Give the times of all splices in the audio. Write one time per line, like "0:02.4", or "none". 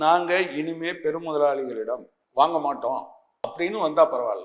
0:03.5

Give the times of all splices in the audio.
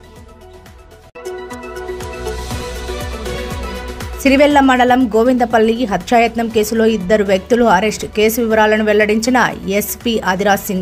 none

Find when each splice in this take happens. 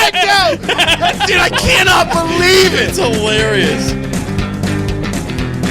0:03.5

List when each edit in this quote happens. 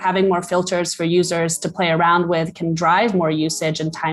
none

